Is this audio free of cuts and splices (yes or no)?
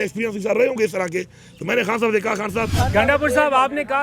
no